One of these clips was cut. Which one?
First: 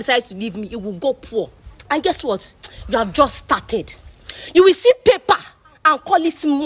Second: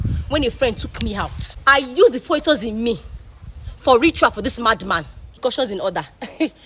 second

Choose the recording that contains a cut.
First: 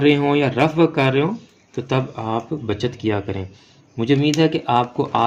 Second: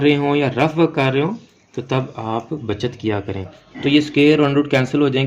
second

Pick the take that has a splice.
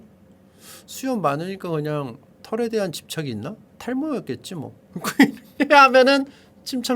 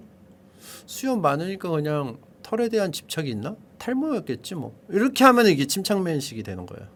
first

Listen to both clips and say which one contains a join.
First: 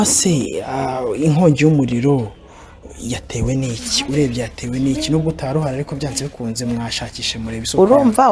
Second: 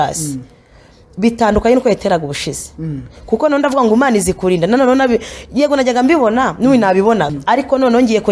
second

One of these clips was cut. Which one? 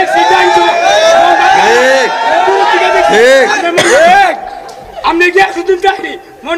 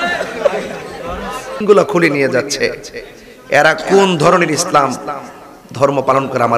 second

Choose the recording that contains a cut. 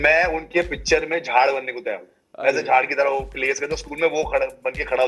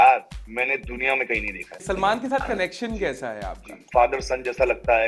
second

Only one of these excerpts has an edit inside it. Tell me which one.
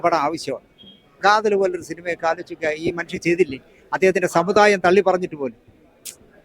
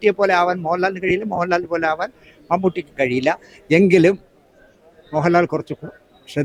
first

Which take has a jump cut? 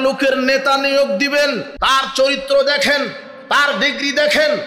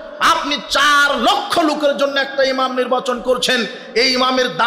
first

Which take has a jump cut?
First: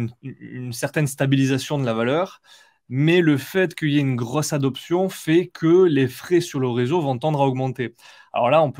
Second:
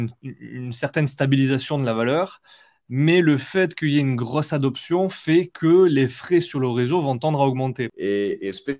second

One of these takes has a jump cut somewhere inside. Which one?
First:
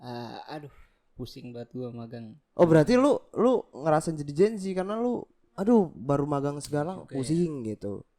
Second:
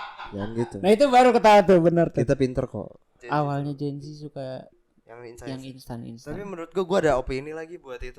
second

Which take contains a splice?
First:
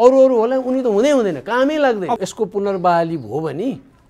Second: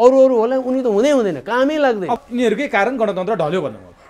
first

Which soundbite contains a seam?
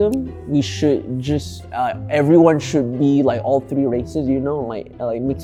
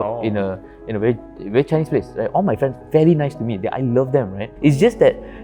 second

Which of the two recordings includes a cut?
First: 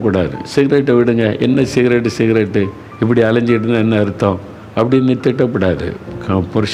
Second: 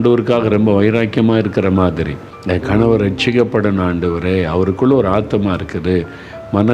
second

